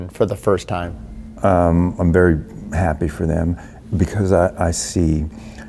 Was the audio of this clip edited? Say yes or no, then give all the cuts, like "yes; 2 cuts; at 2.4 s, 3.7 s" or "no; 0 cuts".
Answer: no; 0 cuts